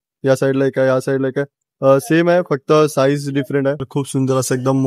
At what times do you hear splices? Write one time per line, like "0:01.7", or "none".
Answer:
0:03.9